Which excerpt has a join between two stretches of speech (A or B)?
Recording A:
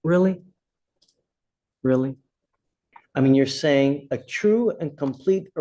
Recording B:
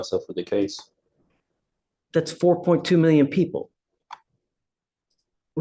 A